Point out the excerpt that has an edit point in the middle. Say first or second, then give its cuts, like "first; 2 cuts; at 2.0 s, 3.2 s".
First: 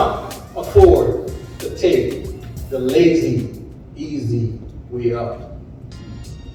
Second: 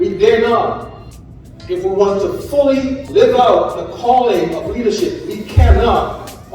second; 1 cut; at 3.0 s